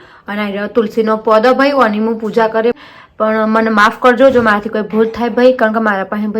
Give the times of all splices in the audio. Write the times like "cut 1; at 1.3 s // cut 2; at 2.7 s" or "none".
cut 1; at 2.8 s